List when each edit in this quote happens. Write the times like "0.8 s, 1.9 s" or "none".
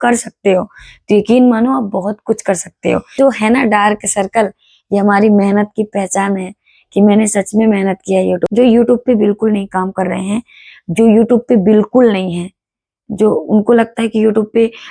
3.2 s, 8.5 s